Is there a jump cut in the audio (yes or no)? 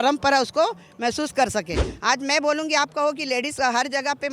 yes